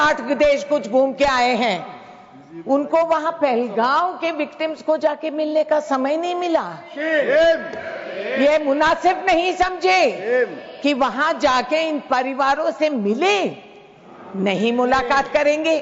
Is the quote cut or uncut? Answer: uncut